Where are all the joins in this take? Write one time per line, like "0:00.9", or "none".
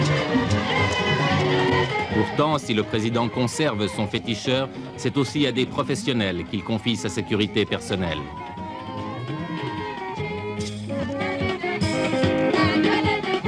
0:10.5